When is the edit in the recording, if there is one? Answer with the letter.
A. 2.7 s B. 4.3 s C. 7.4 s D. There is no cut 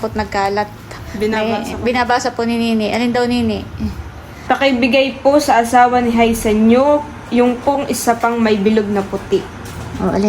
B